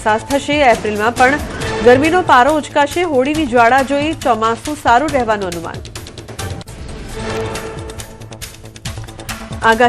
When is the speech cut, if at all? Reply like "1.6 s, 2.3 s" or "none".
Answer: 6.9 s